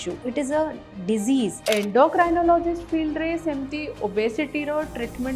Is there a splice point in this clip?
yes; 1 cut; at 1.6 s

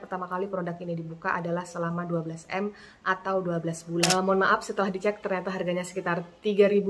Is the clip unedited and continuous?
no; 1 cut; at 4.1 s

